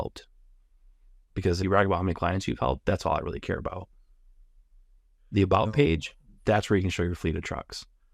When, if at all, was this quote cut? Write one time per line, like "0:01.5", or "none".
0:01.6